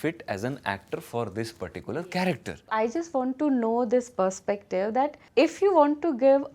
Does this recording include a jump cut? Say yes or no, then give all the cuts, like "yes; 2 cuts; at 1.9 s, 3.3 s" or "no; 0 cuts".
yes; 2 cuts; at 2.8 s, 5.2 s